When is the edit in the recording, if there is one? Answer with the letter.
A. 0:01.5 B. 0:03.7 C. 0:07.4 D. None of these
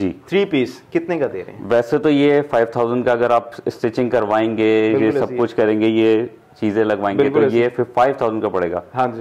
D